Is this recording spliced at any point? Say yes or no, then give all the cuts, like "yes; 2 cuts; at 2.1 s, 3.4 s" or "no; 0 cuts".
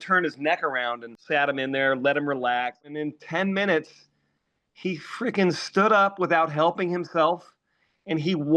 yes; 2 cuts; at 1.1 s, 3.0 s